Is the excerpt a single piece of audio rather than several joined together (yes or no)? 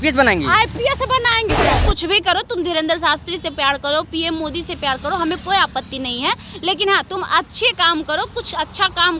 no